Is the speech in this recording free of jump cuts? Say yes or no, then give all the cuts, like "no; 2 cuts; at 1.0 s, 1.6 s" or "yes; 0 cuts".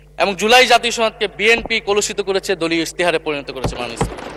yes; 0 cuts